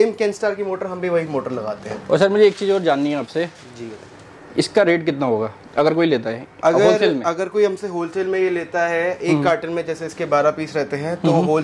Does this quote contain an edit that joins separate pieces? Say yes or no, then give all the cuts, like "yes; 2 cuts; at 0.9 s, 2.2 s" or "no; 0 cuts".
no; 0 cuts